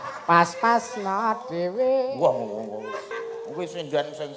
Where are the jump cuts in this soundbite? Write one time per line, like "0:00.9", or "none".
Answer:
0:03.1